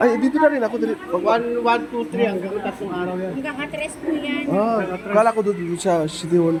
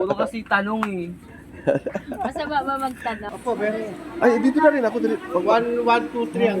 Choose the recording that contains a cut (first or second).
second